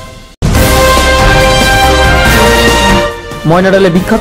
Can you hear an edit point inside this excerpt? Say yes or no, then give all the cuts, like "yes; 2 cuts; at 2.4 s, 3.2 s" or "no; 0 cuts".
no; 0 cuts